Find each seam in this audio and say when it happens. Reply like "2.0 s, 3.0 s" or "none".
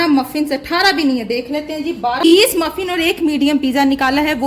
2.3 s